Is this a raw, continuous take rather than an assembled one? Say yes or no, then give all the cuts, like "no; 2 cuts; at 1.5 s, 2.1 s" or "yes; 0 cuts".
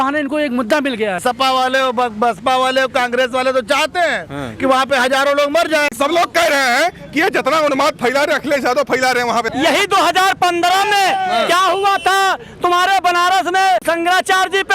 no; 4 cuts; at 1.2 s, 5.9 s, 9.5 s, 13.8 s